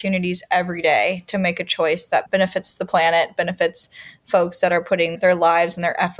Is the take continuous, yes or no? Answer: yes